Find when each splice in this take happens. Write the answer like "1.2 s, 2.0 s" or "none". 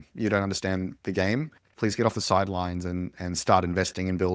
1.7 s